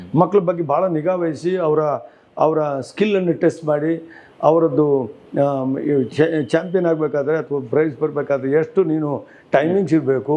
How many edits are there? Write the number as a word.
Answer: zero